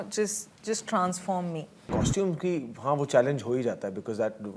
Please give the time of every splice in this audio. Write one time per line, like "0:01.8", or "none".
0:01.8